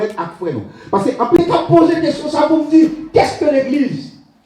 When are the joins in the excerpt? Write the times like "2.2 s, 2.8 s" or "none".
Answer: 1.4 s